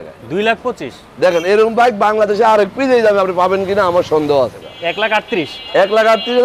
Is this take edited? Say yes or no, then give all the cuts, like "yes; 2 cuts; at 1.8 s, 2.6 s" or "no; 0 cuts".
yes; 1 cut; at 4.7 s